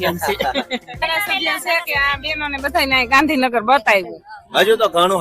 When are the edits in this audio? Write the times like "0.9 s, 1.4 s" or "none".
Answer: 1.0 s